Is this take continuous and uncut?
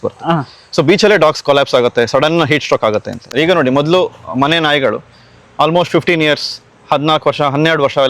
no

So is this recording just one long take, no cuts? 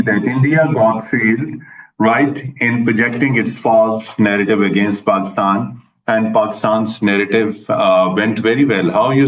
yes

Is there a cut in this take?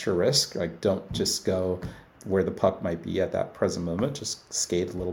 yes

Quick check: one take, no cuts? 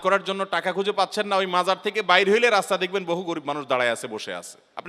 yes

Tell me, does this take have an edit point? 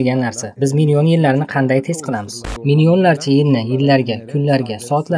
yes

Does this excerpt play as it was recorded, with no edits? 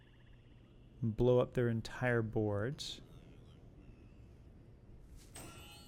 yes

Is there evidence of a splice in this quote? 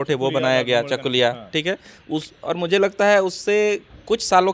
no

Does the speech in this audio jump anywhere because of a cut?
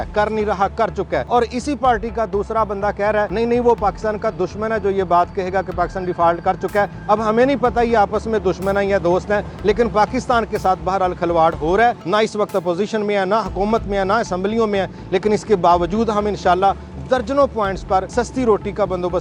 yes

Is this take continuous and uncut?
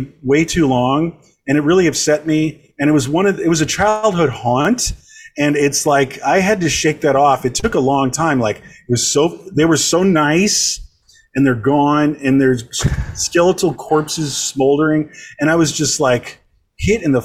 yes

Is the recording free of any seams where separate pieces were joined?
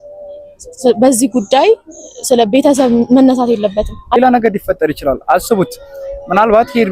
no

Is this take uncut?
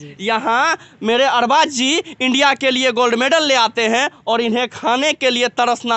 yes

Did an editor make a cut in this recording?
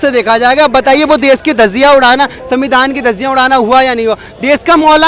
no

